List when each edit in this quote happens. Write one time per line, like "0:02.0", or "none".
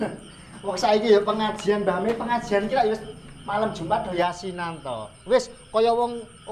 none